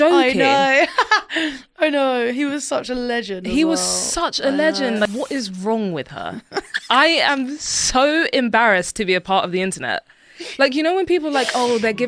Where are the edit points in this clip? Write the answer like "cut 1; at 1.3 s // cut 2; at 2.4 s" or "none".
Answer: cut 1; at 5.1 s